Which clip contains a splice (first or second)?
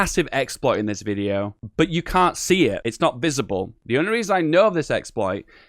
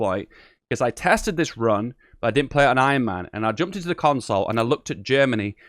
first